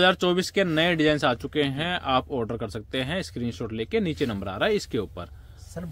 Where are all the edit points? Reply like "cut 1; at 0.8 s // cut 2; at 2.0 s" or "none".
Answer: none